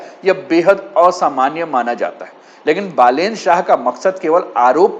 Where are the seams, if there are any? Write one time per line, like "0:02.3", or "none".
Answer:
none